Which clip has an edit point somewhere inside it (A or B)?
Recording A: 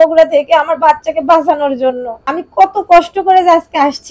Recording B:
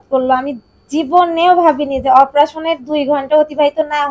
A